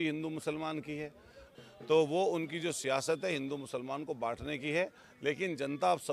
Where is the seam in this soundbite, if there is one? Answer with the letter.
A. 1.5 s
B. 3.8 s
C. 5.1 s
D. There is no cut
A